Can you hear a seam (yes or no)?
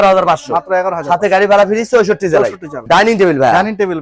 yes